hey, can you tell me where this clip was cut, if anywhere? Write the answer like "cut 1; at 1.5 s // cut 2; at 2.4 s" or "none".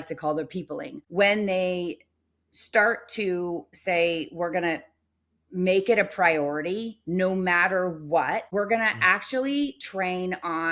cut 1; at 1.0 s // cut 2; at 8.5 s